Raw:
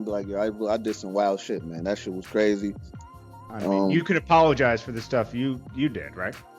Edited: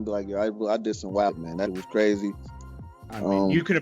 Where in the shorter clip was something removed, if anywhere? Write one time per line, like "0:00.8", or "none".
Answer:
0:01.5

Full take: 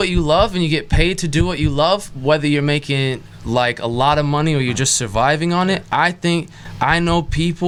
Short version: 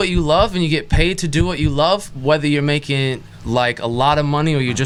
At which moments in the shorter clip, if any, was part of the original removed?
none

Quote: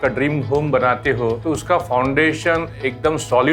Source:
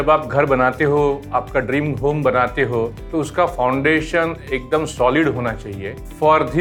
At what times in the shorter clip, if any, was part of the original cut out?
0:01.4

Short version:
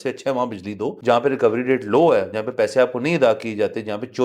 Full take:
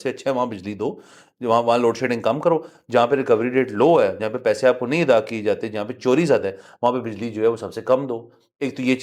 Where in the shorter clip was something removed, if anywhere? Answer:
0:00.9

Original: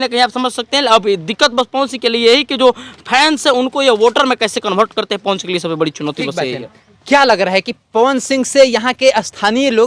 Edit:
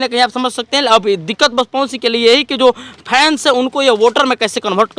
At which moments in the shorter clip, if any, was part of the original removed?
none

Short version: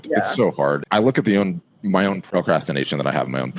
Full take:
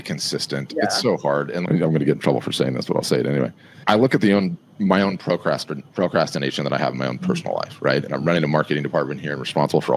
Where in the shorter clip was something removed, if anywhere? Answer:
0:00.8
0:02.2

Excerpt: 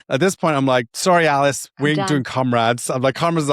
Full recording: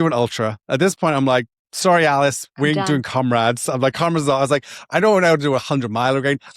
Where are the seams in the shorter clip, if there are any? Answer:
0:00.9

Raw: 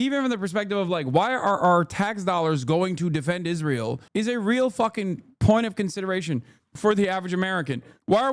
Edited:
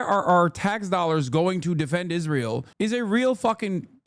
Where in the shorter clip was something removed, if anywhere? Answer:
none

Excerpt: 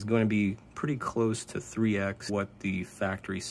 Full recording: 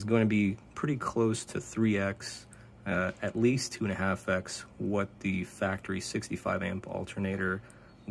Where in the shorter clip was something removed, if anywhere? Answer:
0:02.3

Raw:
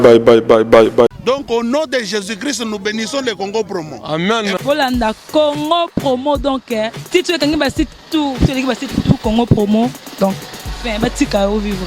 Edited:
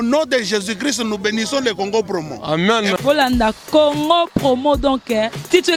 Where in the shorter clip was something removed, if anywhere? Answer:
none

